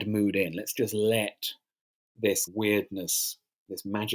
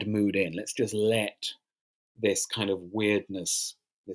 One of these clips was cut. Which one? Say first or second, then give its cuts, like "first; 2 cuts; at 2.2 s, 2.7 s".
first; 1 cut; at 2.5 s